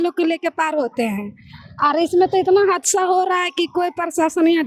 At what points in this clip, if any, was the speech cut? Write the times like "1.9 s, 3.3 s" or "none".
none